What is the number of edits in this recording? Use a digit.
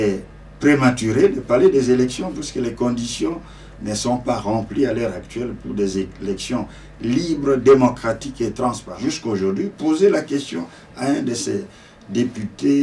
1